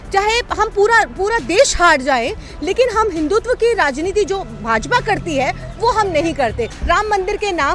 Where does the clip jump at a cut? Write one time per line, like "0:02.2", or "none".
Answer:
0:06.7